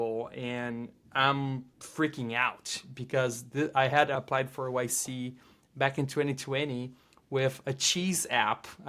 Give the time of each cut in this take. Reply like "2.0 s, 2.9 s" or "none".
1.8 s, 4.2 s